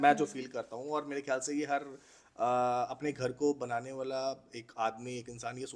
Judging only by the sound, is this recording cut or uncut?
uncut